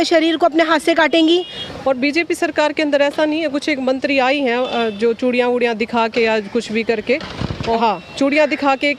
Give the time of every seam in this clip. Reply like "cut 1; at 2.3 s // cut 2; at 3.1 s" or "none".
cut 1; at 1.5 s // cut 2; at 7.6 s